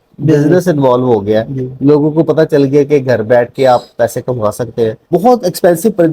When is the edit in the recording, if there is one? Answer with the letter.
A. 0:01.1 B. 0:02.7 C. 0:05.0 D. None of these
C